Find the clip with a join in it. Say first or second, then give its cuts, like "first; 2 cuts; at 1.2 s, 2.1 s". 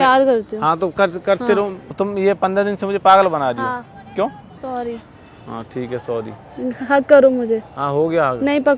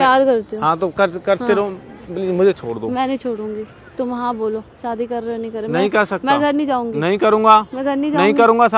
first; 2 cuts; at 1.8 s, 4.5 s